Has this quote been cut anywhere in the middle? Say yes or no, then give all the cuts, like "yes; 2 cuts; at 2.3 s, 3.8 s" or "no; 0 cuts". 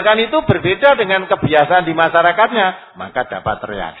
no; 0 cuts